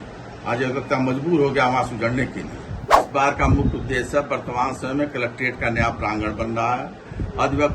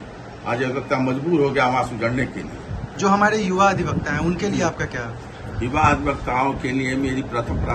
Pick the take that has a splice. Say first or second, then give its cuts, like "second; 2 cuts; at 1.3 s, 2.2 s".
first; 1 cut; at 3.0 s